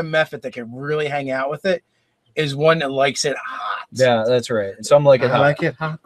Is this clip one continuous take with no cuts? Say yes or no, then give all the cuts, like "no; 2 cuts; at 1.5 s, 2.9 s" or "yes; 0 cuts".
yes; 0 cuts